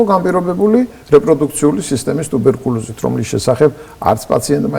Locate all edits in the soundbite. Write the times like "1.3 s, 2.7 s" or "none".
none